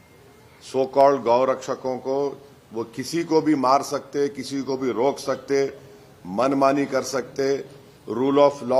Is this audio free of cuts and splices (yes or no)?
yes